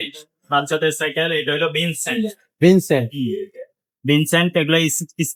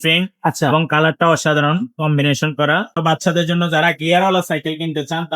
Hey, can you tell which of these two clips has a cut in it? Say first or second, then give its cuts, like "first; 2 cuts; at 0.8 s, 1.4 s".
second; 1 cut; at 3.0 s